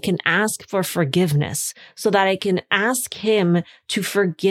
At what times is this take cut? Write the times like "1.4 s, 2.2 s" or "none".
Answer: none